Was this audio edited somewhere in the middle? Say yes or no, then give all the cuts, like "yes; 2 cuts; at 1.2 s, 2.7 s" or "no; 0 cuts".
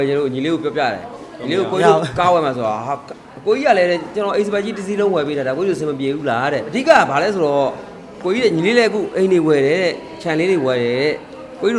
yes; 1 cut; at 6.7 s